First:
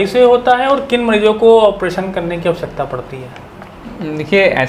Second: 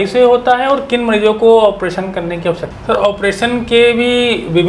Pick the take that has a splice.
second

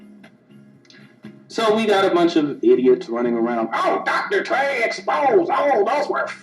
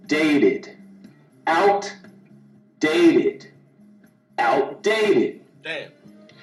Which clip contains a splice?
first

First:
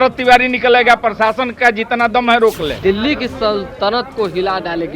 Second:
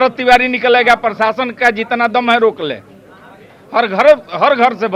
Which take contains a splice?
first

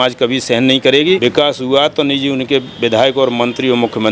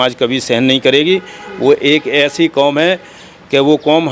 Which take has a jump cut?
first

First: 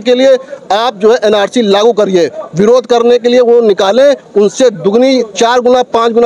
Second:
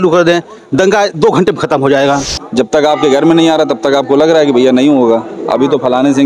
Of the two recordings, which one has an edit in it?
second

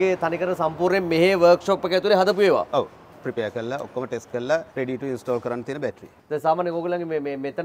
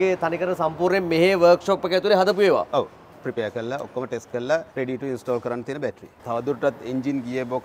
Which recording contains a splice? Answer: second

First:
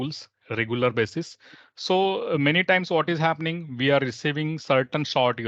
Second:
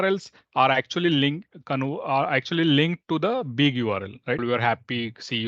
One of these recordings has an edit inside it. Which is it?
second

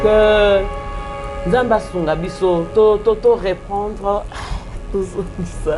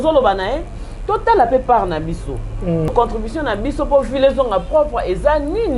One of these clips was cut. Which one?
second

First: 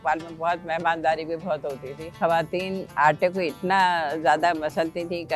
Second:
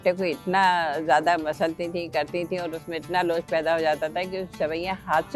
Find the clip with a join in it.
first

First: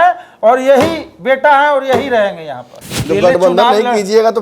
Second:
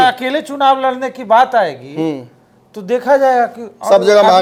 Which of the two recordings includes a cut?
first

